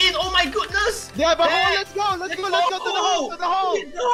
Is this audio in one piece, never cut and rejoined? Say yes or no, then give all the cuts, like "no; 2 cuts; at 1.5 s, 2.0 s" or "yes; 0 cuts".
yes; 0 cuts